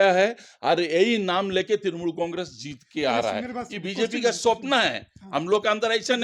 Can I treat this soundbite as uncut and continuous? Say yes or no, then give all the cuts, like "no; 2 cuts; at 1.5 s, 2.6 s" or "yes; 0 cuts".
yes; 0 cuts